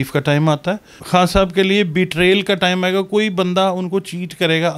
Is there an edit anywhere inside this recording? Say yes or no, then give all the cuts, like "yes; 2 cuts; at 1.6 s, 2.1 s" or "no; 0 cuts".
yes; 1 cut; at 0.9 s